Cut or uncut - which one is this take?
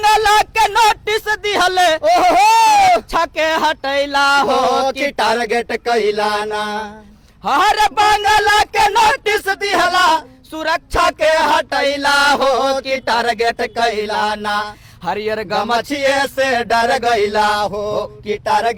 uncut